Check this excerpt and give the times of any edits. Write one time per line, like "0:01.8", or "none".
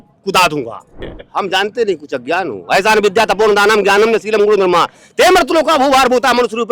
0:01.2